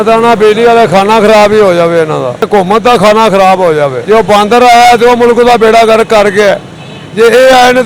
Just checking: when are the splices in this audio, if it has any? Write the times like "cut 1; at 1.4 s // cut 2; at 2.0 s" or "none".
cut 1; at 2.5 s // cut 2; at 4.0 s